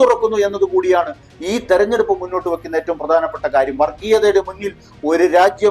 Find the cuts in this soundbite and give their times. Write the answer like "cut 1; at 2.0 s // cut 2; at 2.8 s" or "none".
cut 1; at 4.8 s